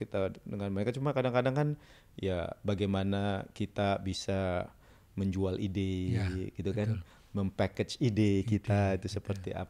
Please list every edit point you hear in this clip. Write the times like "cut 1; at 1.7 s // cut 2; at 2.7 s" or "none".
none